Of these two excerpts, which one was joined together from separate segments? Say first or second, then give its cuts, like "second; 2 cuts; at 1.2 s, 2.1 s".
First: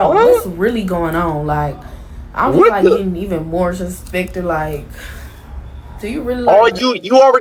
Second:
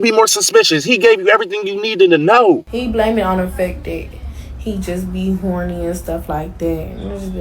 second; 1 cut; at 2.7 s